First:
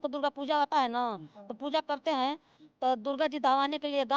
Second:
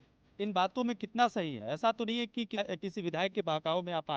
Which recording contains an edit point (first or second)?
second